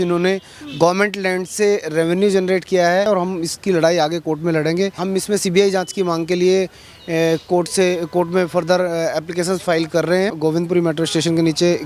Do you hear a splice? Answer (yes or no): yes